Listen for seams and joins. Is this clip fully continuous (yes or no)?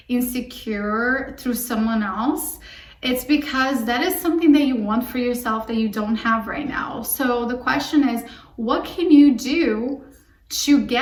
yes